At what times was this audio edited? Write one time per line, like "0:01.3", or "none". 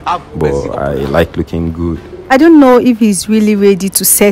0:02.3